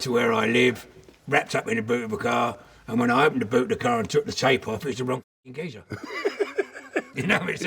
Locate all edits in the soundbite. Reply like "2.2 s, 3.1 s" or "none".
2.7 s